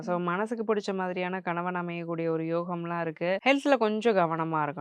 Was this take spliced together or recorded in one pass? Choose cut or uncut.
cut